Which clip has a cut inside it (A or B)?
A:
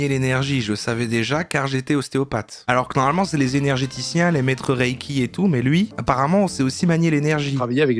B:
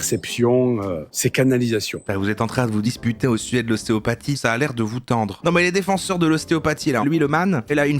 B